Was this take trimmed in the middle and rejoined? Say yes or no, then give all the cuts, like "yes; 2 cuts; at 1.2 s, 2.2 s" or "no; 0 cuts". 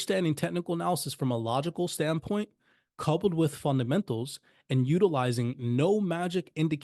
no; 0 cuts